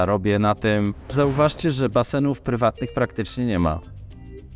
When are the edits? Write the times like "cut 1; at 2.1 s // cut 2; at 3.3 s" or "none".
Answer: cut 1; at 1.1 s